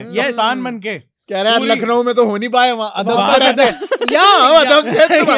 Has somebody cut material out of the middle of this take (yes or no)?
no